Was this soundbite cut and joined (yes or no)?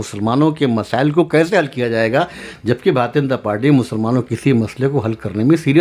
no